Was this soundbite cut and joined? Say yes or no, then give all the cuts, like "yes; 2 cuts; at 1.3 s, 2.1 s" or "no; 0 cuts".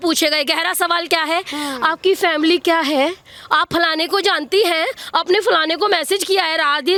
no; 0 cuts